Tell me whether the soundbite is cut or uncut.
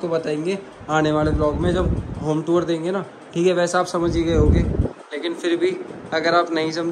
uncut